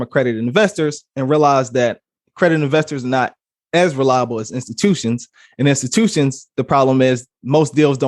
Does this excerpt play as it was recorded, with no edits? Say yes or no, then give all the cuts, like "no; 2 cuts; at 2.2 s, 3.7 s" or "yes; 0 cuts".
yes; 0 cuts